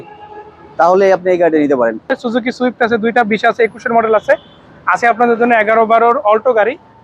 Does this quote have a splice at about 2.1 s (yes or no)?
yes